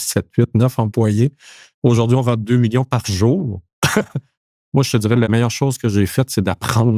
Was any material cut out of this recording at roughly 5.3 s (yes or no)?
yes